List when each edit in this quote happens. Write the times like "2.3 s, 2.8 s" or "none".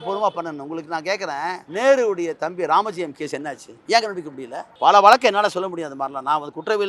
1.6 s, 3.9 s, 4.9 s